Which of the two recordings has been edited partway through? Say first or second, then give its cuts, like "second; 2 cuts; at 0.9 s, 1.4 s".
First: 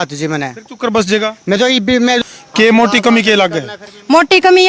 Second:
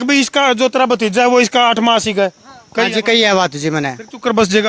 first; 1 cut; at 2.2 s